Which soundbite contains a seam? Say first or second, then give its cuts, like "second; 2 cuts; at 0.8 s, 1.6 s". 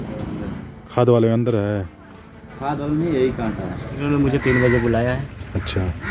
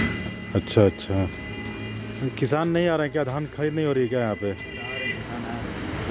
first; 1 cut; at 3.9 s